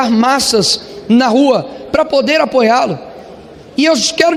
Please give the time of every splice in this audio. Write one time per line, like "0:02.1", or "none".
none